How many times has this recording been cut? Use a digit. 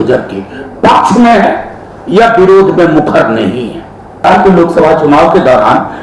1